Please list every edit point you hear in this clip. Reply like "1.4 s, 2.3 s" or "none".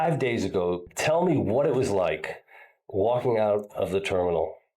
0.9 s